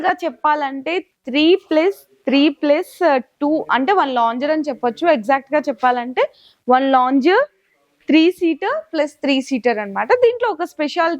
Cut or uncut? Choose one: uncut